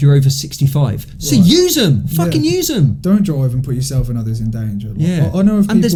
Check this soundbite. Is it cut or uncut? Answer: uncut